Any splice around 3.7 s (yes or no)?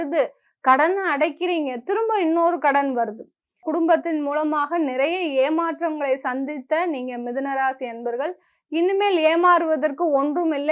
yes